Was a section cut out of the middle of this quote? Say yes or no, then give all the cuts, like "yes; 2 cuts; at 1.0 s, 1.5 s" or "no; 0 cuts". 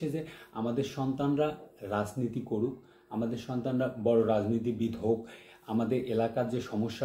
no; 0 cuts